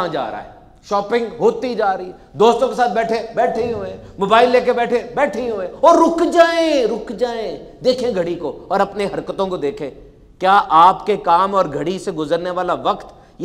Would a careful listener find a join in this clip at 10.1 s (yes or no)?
no